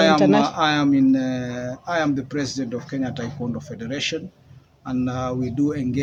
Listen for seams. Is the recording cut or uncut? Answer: uncut